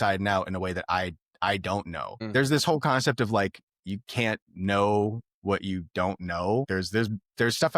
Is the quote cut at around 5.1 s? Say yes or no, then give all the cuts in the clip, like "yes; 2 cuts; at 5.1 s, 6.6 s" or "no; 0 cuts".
no; 2 cuts; at 2.1 s, 6.7 s